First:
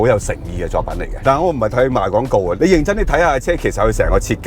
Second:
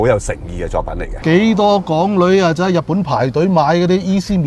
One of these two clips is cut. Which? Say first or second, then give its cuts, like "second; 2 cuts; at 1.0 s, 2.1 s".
second; 1 cut; at 1.1 s